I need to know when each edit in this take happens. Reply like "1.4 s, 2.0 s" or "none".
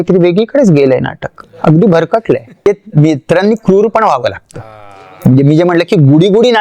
2.6 s